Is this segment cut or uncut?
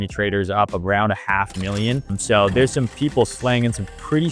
cut